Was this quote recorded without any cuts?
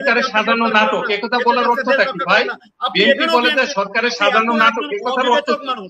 yes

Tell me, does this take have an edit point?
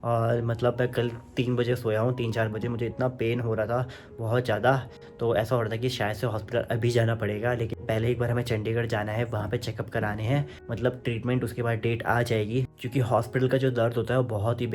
yes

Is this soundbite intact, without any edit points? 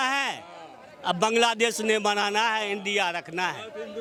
yes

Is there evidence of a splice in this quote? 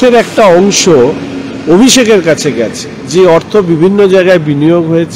no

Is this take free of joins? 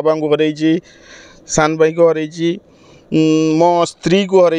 yes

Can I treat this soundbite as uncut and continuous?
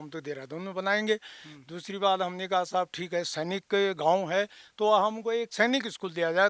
yes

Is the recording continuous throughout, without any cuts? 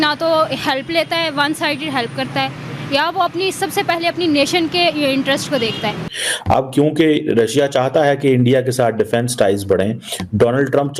no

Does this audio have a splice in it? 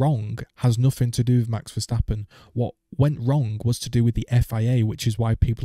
no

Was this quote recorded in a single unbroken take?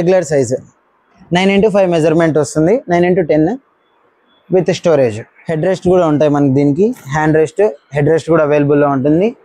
yes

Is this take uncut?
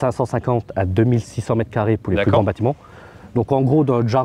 yes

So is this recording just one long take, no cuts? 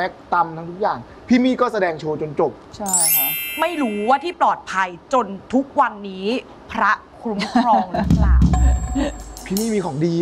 yes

